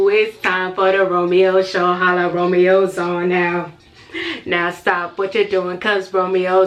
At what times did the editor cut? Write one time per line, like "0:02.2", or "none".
none